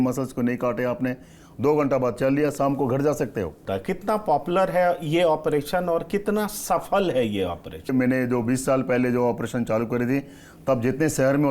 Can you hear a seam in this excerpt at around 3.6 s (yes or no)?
yes